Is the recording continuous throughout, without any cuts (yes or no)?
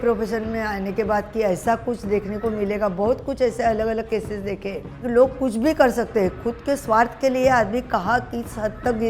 yes